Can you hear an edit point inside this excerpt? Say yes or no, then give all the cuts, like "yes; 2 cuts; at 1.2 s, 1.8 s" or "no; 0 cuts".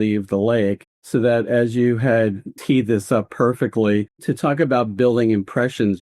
yes; 3 cuts; at 0.9 s, 2.5 s, 4.2 s